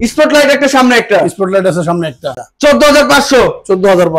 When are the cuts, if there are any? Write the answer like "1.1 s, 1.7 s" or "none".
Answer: 2.3 s